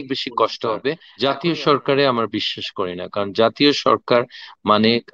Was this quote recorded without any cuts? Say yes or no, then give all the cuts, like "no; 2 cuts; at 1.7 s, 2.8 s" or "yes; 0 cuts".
no; 1 cut; at 1.1 s